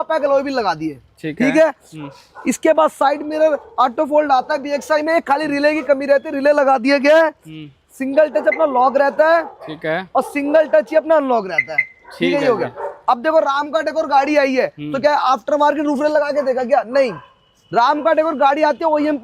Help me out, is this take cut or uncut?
uncut